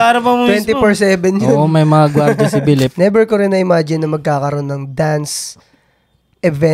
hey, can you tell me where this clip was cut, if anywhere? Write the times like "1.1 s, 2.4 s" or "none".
2.9 s